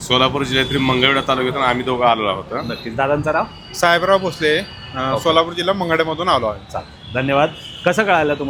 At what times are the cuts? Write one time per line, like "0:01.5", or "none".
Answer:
none